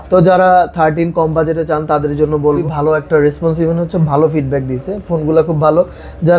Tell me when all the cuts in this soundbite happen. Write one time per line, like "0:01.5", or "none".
0:02.6